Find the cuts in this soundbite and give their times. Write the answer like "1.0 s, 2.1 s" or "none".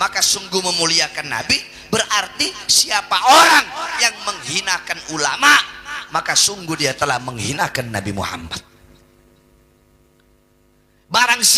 none

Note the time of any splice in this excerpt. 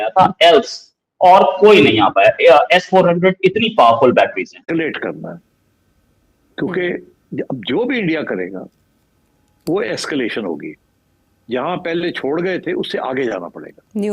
4.6 s

